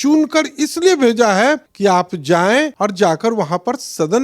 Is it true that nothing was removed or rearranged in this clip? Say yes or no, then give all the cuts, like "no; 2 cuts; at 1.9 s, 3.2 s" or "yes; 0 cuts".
no; 2 cuts; at 1.7 s, 2.7 s